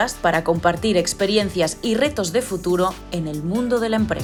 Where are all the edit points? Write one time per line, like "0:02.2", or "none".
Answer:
none